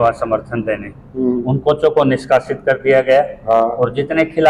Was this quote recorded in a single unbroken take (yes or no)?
yes